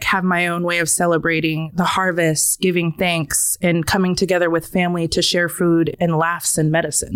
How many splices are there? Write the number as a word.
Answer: one